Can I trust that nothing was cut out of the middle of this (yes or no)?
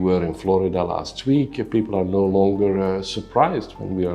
yes